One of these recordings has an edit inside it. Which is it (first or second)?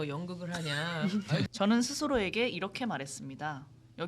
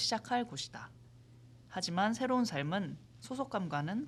first